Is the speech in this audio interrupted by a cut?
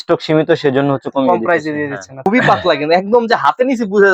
yes; 1 cut; at 2.2 s

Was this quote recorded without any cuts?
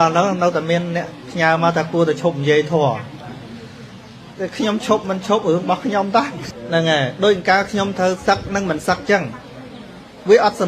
no; 1 cut; at 6.4 s

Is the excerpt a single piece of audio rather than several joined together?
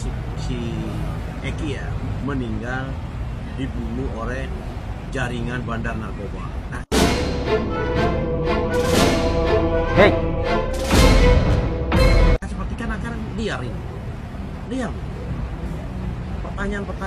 yes; 0 cuts

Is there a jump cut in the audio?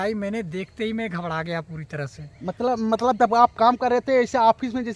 no; 0 cuts

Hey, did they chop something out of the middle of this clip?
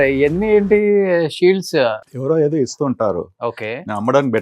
yes; 1 cut; at 2.1 s

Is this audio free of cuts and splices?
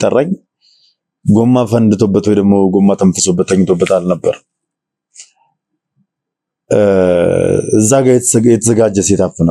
yes; 0 cuts

